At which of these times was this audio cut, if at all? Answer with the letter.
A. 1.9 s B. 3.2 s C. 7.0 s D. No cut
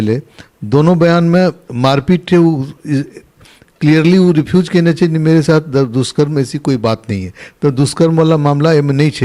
D